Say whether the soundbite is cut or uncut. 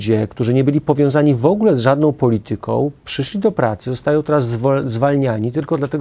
uncut